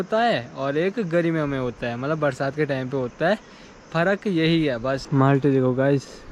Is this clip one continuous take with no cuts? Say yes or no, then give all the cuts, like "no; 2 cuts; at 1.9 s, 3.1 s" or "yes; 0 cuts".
yes; 0 cuts